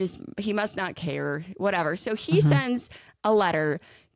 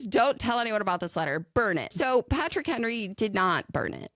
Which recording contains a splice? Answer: second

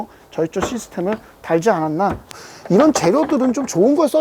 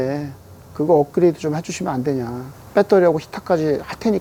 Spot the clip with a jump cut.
first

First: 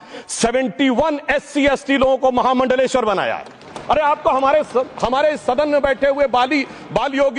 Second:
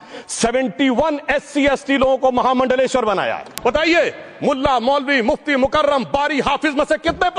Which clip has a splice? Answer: second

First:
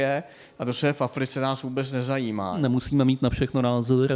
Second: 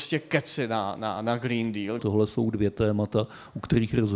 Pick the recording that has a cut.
second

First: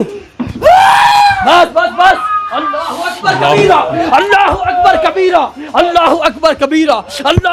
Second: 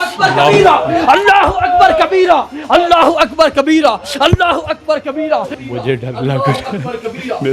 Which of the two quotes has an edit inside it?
second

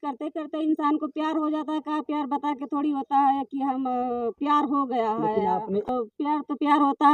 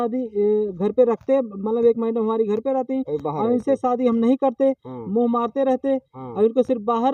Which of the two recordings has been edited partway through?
first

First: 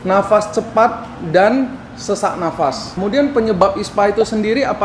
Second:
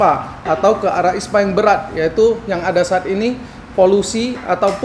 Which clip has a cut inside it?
first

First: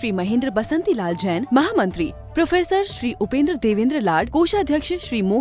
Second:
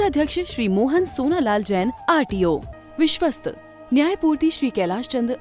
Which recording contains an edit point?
second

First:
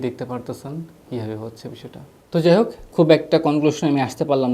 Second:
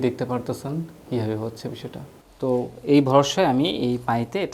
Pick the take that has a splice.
second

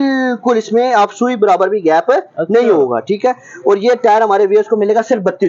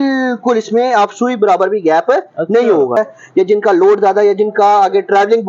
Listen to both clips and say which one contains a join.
second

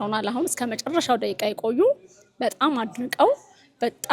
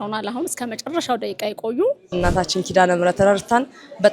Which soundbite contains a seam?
second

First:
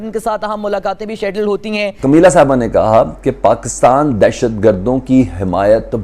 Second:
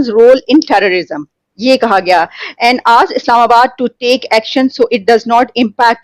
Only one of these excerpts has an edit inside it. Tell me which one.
first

